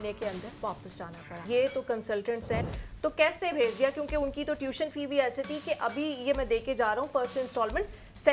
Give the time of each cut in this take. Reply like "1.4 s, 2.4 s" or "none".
1.4 s, 2.7 s